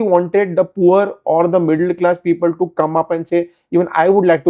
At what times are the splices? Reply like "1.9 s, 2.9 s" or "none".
none